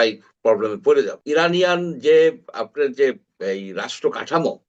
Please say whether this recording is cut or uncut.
cut